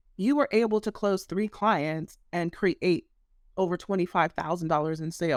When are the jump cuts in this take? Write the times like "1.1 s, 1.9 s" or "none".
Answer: none